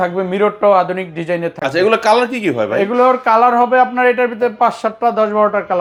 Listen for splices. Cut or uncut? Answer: uncut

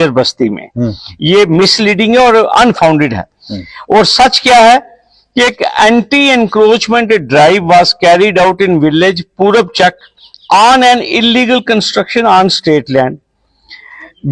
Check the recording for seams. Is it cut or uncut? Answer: uncut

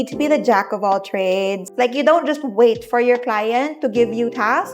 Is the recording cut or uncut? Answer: cut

